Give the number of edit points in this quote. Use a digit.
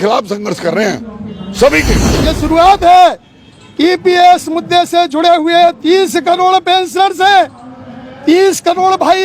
1